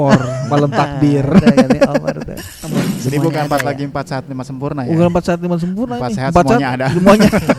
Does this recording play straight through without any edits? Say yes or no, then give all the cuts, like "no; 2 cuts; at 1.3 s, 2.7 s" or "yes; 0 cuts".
no; 1 cut; at 2.9 s